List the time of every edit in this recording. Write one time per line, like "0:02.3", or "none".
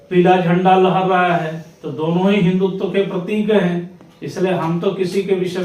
none